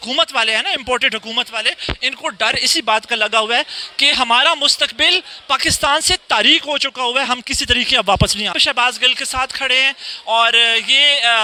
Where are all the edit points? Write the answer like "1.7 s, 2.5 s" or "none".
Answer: none